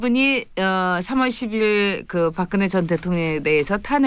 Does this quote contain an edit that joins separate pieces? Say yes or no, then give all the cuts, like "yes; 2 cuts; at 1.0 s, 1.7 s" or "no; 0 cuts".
yes; 1 cut; at 2.5 s